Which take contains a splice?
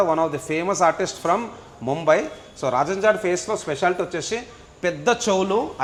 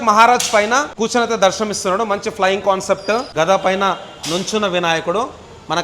second; 2 cuts; at 0.9 s, 3.3 s

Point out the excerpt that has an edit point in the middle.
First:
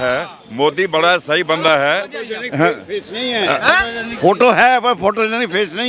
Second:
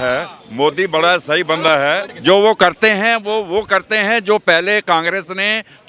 second; 1 cut; at 2.1 s

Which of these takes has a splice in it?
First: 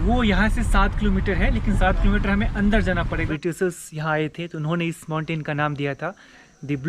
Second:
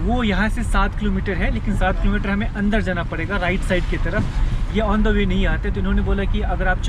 first; 1 cut; at 3.2 s

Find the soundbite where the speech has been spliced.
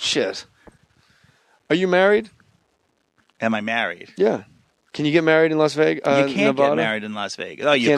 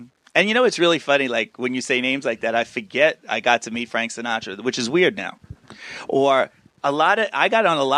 first; 1 cut; at 6.8 s

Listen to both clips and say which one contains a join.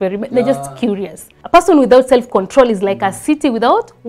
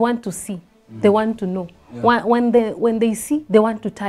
first; 1 cut; at 1.3 s

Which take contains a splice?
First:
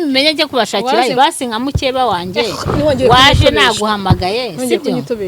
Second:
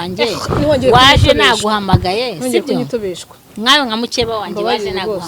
first; 1 cut; at 1.1 s

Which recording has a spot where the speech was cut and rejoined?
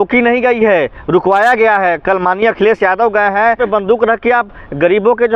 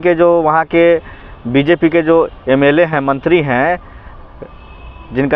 first; 1 cut; at 3.6 s

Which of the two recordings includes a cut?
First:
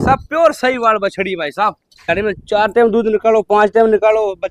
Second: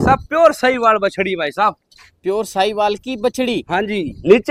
first; 1 cut; at 2.1 s

